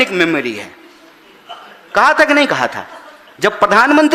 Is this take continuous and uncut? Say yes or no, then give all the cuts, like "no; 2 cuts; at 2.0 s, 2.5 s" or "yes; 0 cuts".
yes; 0 cuts